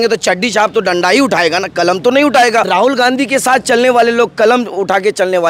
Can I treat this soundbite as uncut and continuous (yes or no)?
no